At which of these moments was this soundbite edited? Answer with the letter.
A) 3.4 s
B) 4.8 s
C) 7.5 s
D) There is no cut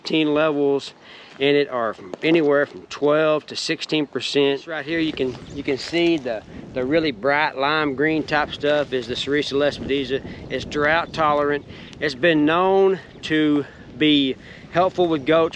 B